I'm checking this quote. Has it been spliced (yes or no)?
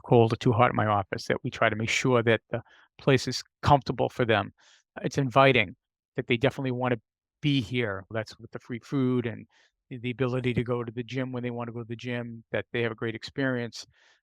yes